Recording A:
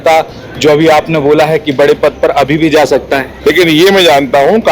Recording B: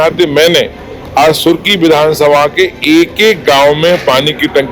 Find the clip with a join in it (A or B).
A